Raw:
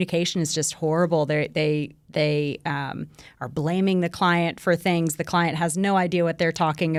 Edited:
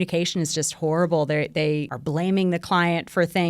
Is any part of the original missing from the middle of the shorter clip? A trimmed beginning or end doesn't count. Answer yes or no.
yes